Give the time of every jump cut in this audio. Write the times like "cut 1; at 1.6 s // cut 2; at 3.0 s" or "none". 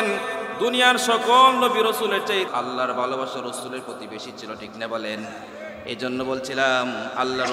cut 1; at 2.5 s